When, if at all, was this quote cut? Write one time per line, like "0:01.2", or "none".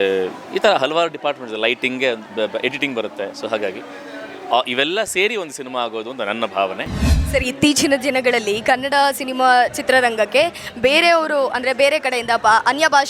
0:07.2